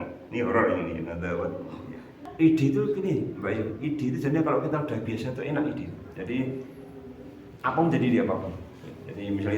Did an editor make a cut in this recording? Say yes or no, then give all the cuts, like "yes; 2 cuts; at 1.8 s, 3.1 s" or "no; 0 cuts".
yes; 1 cut; at 2.2 s